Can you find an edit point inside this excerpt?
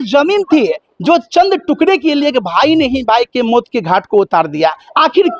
no; 0 cuts

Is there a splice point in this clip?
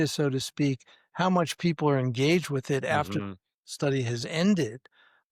no; 0 cuts

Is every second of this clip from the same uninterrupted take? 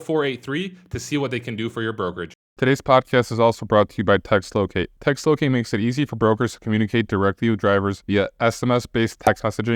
no; 1 cut; at 2.5 s

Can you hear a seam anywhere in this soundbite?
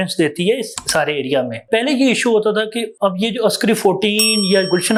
no; 0 cuts

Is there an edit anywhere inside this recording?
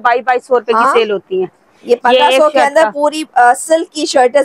no; 0 cuts

